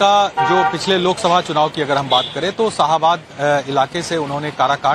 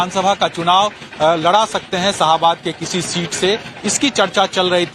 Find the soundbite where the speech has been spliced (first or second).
first